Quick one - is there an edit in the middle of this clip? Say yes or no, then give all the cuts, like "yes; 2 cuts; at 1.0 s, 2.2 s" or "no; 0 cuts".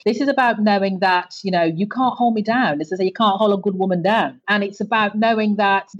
no; 0 cuts